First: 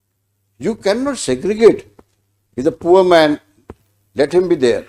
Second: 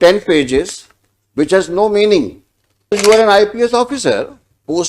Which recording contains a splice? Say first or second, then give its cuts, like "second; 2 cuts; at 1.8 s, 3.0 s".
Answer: second; 2 cuts; at 2.9 s, 4.1 s